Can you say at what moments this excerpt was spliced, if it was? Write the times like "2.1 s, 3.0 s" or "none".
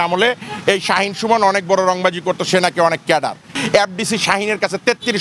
3.6 s